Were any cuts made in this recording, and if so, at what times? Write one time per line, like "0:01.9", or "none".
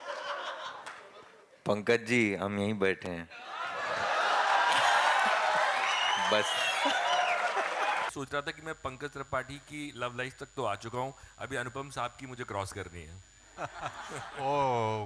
0:08.1